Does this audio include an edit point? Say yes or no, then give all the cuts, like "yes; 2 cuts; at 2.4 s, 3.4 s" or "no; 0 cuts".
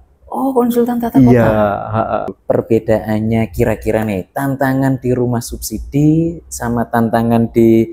yes; 1 cut; at 2.3 s